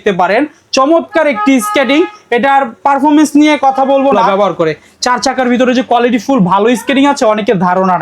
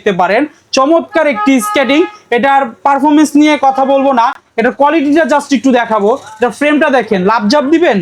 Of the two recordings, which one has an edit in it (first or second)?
first